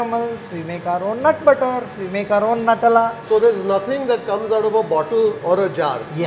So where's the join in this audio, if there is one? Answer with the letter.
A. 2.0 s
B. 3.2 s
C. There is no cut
B